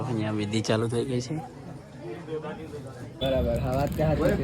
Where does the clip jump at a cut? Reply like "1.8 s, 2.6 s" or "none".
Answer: 3.2 s